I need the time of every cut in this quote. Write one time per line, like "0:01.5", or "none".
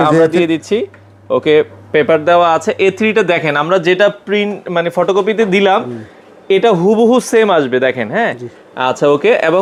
none